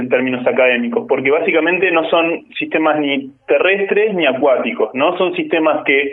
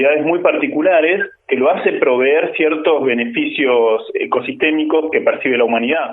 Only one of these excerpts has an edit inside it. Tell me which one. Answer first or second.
second